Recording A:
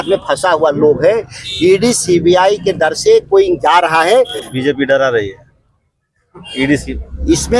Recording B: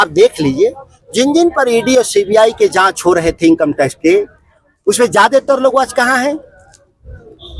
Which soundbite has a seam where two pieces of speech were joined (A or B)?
A